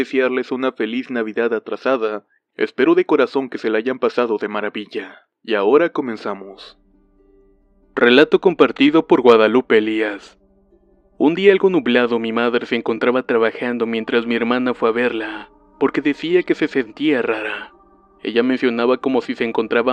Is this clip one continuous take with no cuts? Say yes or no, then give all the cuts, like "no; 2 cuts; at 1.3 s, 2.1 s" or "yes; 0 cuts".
yes; 0 cuts